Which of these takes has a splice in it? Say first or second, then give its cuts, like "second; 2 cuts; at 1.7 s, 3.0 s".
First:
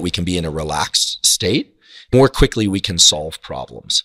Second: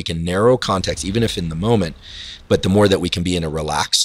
first; 1 cut; at 2.1 s